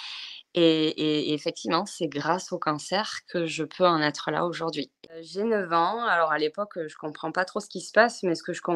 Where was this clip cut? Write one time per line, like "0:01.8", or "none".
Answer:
0:05.3